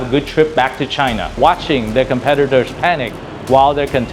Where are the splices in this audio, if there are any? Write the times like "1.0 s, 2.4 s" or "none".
1.4 s